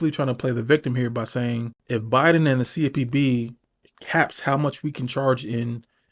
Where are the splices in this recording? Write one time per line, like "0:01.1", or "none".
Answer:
0:01.7